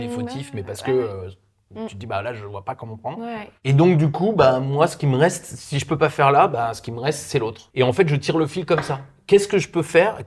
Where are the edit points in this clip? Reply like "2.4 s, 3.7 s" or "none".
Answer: 7.6 s